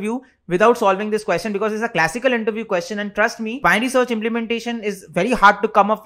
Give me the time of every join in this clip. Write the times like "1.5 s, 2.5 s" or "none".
3.6 s